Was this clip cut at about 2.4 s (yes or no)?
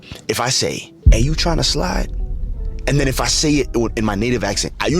no